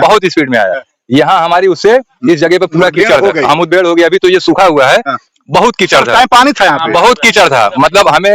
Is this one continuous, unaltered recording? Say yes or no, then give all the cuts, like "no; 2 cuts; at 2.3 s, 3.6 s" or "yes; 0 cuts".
yes; 0 cuts